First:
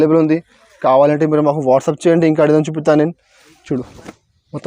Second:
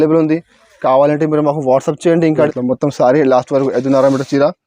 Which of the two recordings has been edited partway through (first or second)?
second